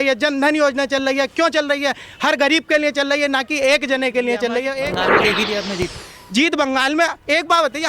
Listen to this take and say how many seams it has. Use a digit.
1